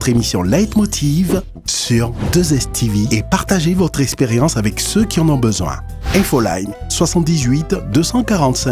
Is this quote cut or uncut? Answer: uncut